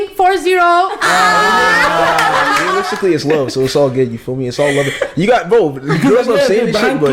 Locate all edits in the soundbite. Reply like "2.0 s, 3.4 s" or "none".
2.8 s